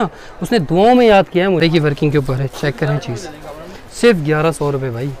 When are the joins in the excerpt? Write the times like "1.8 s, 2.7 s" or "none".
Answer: 1.6 s